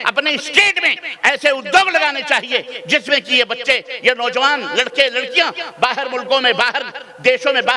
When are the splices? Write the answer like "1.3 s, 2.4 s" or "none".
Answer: none